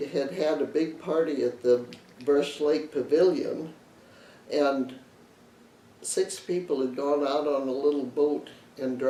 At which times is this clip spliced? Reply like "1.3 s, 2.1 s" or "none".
none